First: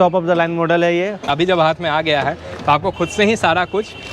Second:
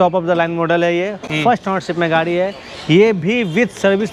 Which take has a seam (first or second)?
first